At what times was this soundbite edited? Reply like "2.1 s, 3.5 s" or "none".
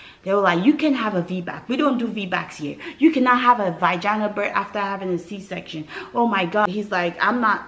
6.7 s